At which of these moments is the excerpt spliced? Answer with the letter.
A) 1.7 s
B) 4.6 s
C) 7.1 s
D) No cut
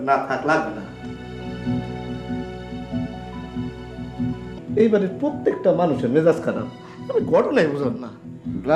B